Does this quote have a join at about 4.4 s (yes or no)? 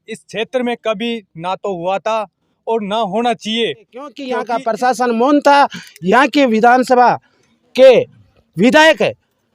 yes